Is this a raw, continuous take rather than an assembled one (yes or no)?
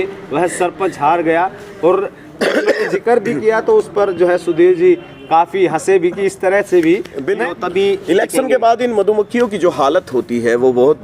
no